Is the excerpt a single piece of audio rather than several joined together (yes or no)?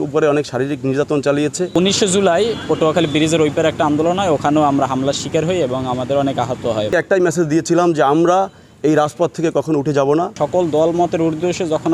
no